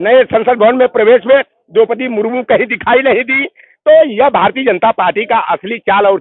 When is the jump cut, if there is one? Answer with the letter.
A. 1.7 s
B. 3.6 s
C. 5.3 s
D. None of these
D